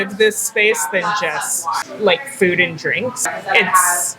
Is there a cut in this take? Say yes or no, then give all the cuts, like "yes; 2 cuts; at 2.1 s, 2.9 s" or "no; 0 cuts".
yes; 2 cuts; at 1.9 s, 3.4 s